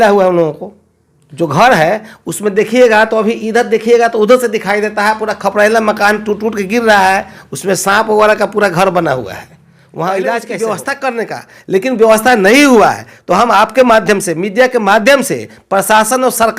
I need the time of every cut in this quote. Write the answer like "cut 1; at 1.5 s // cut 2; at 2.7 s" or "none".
cut 1; at 10.5 s